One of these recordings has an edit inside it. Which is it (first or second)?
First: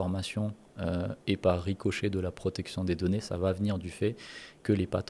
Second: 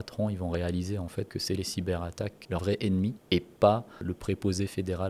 second